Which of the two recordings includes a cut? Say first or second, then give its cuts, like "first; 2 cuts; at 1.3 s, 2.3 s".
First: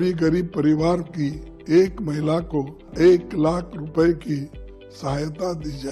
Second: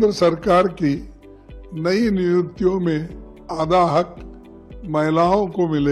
first; 1 cut; at 2.9 s